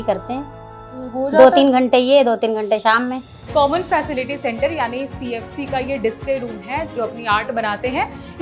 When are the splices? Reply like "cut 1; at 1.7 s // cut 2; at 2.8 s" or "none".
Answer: cut 1; at 3.3 s // cut 2; at 6.9 s